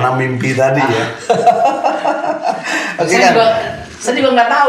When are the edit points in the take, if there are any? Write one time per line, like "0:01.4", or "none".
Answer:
none